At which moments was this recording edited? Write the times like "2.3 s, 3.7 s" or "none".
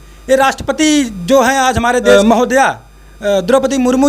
2.1 s